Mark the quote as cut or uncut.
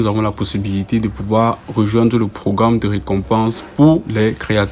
uncut